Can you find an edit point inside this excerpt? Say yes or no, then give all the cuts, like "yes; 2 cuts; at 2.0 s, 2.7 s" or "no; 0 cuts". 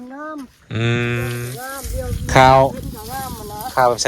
yes; 1 cut; at 1.5 s